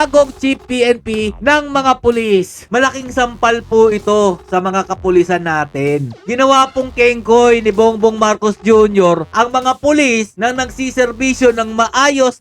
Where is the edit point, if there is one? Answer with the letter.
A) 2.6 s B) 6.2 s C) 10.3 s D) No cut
A